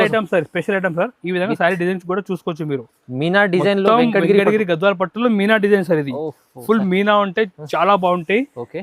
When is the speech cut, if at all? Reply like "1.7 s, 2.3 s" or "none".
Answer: none